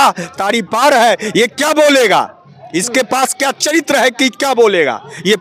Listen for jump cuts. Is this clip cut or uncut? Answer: uncut